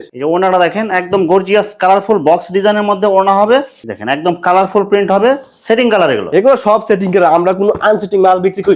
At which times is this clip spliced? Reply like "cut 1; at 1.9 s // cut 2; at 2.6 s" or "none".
none